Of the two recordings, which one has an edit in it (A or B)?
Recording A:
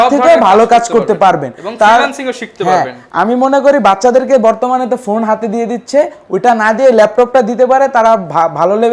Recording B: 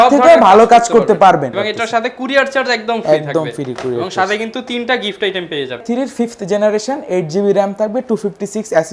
B